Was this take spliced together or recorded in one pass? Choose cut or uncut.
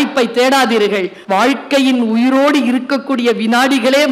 cut